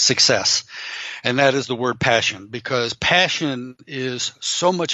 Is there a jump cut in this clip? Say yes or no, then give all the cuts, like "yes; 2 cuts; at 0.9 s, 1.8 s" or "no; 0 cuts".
no; 0 cuts